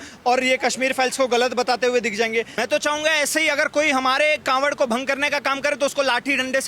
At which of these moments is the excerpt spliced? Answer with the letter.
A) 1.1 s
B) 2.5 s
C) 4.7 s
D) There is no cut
B